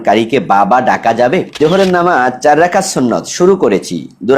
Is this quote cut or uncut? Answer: cut